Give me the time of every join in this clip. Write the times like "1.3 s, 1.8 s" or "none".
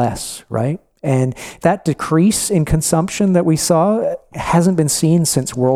1.5 s